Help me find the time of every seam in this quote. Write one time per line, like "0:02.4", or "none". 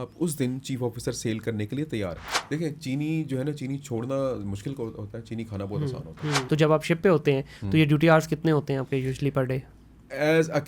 0:02.2
0:06.4